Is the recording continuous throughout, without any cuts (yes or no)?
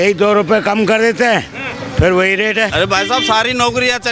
no